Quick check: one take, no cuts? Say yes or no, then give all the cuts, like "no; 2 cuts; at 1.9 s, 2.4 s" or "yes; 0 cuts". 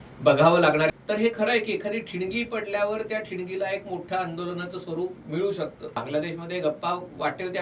no; 2 cuts; at 0.9 s, 6.0 s